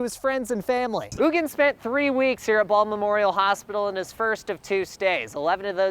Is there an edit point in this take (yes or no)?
yes